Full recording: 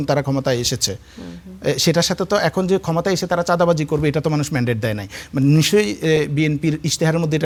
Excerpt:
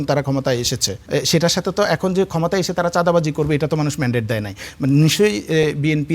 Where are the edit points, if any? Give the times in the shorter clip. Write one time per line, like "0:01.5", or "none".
0:00.9